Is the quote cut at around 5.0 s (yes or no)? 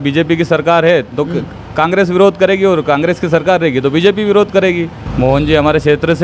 yes